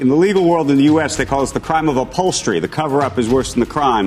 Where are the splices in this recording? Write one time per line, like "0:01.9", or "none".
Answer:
none